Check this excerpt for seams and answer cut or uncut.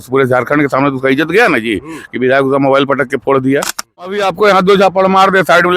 cut